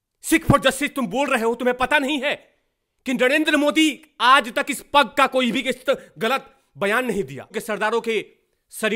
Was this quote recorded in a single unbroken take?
no; 1 cut; at 7.5 s

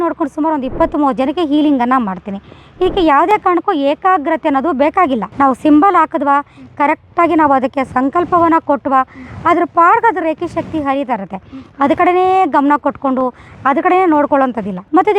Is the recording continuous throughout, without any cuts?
yes; 0 cuts

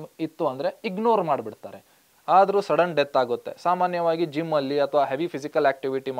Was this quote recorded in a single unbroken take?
no; 1 cut; at 2.1 s

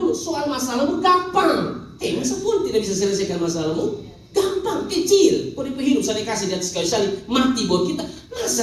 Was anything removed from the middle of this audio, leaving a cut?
no; 0 cuts

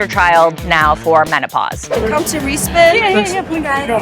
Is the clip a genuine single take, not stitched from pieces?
no; 1 cut; at 1.9 s

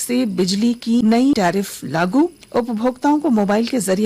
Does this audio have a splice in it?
yes; 2 cuts; at 1.3 s, 2.4 s

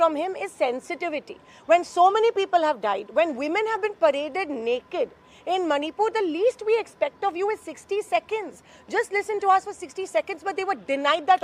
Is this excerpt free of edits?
yes; 0 cuts

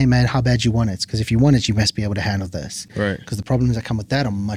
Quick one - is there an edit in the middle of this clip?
no; 0 cuts

